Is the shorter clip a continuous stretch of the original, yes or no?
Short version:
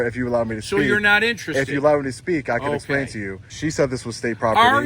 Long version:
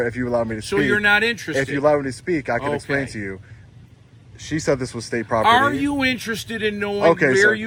no